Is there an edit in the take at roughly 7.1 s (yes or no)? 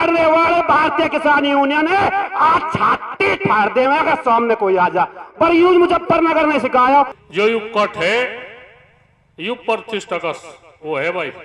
yes